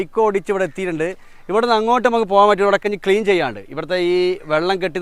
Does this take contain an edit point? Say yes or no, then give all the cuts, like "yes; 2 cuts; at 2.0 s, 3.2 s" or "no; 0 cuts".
no; 0 cuts